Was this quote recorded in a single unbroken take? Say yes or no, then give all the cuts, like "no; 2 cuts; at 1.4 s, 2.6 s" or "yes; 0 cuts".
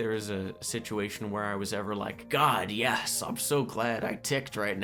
yes; 0 cuts